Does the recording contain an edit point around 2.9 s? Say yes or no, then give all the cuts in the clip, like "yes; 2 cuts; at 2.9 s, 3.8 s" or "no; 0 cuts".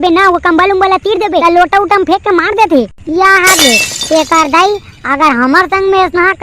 no; 1 cut; at 1.4 s